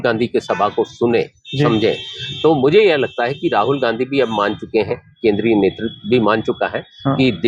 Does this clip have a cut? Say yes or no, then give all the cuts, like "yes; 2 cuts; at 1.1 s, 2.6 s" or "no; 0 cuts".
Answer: no; 0 cuts